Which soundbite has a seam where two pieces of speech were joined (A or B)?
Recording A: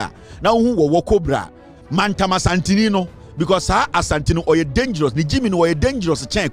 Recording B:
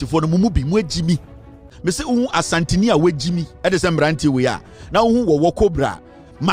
B